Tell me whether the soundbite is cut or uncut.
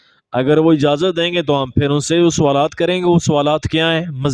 uncut